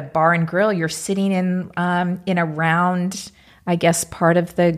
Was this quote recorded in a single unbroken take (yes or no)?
yes